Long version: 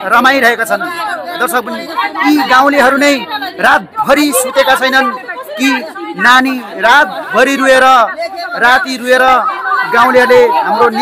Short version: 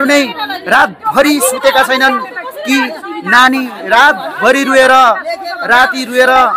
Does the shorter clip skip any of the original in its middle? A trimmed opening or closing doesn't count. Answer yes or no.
no